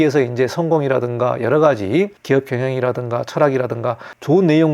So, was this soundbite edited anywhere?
yes; 1 cut; at 2.2 s

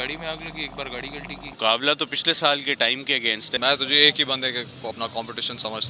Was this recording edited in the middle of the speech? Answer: yes; 2 cuts; at 1.5 s, 3.6 s

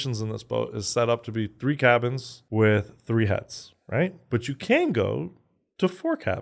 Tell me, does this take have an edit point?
no; 0 cuts

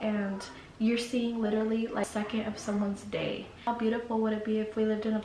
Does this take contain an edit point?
yes; 2 cuts; at 2.0 s, 3.6 s

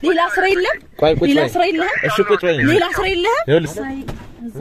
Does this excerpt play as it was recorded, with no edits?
no; 1 cut; at 3.7 s

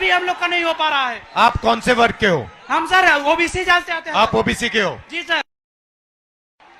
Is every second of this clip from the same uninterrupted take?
yes; 0 cuts

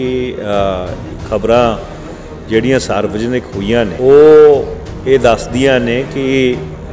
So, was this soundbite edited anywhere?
yes; 1 cut; at 3.9 s

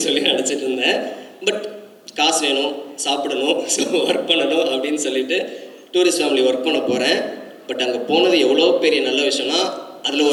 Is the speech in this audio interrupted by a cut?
no; 0 cuts

